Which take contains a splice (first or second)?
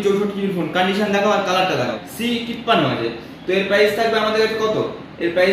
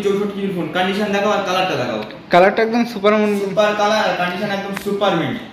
first